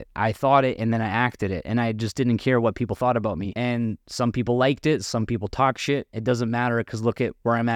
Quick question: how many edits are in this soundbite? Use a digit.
1